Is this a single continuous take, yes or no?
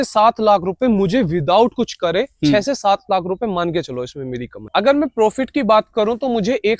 yes